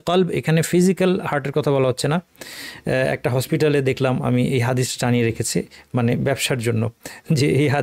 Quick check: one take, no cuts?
yes; 0 cuts

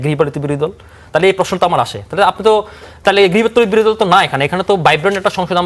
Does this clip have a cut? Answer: no; 0 cuts

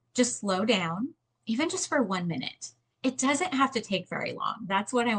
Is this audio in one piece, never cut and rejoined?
yes; 0 cuts

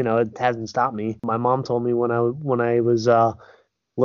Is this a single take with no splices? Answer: no; 1 cut; at 1.2 s

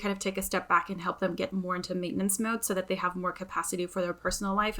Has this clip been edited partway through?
no; 0 cuts

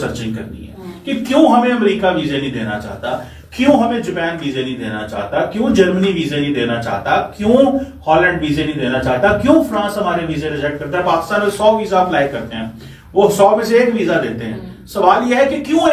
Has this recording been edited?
no; 0 cuts

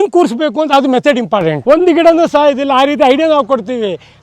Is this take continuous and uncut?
no; 1 cut; at 1.6 s

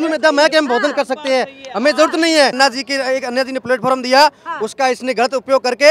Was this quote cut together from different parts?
yes; 1 cut; at 2.6 s

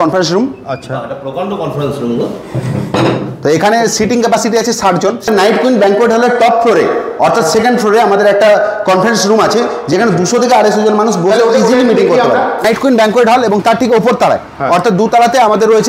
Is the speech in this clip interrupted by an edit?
yes; 2 cuts; at 5.3 s, 12.6 s

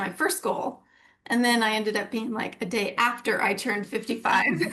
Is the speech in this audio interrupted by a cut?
no; 0 cuts

